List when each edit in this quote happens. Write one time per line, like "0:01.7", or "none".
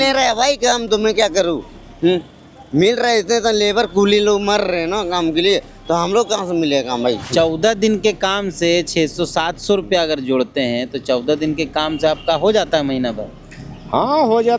0:07.3